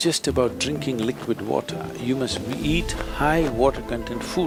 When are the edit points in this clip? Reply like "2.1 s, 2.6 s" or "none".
none